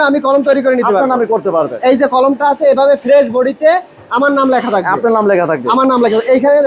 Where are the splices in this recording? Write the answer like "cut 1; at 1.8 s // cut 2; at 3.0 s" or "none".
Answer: none